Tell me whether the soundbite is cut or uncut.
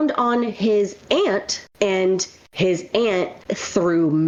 uncut